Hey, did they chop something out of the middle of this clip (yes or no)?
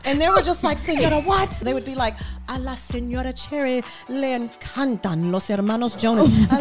yes